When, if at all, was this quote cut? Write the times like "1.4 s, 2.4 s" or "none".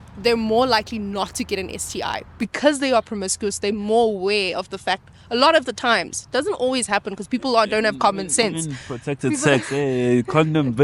none